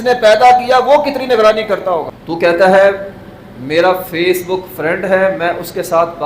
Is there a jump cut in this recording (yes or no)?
yes